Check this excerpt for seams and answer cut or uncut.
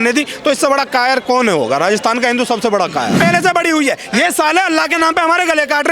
cut